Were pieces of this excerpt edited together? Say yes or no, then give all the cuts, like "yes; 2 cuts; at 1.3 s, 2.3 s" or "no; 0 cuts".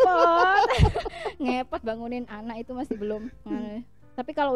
no; 0 cuts